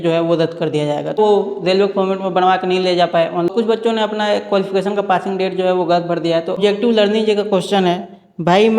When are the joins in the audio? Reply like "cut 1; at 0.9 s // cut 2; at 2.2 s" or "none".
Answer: cut 1; at 1.2 s // cut 2; at 3.5 s // cut 3; at 6.6 s